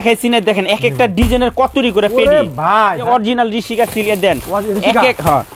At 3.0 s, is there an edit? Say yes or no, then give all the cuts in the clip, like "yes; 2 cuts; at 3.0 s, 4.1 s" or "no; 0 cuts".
yes; 1 cut; at 3.0 s